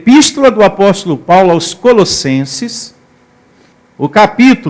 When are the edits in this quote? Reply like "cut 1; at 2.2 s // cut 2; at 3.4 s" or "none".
none